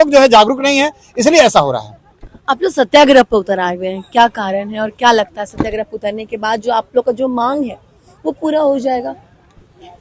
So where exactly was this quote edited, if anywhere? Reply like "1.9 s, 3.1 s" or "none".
none